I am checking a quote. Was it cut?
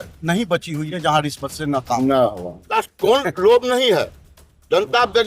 yes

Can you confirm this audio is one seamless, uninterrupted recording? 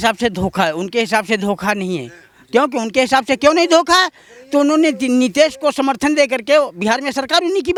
yes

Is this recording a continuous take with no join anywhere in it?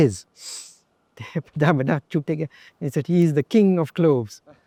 yes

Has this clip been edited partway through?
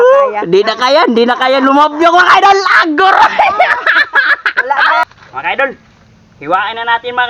yes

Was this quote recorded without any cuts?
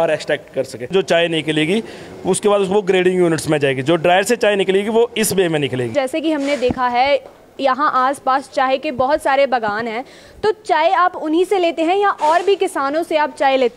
no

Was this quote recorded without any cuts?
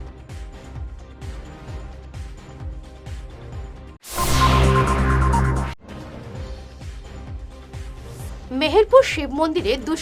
yes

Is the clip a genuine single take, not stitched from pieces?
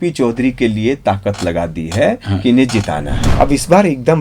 no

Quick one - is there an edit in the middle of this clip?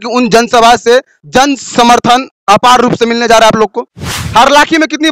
yes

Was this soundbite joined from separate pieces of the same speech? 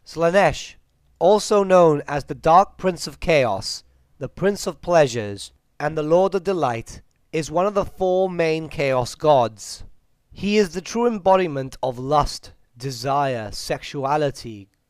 yes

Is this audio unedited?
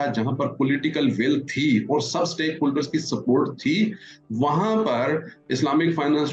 yes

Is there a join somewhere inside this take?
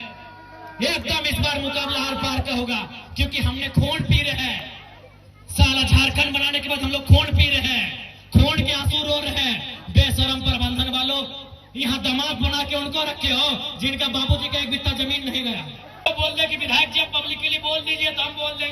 yes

